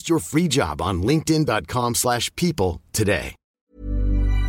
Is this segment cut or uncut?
cut